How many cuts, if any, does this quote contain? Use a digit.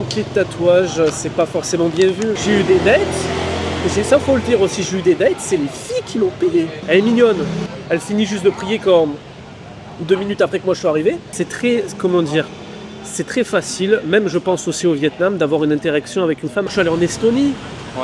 5